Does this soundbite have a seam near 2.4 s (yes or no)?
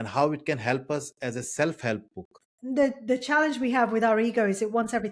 yes